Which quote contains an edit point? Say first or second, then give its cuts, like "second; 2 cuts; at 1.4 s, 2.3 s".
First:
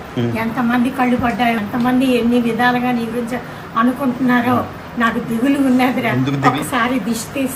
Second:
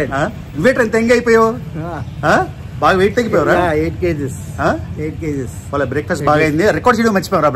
first; 1 cut; at 1.6 s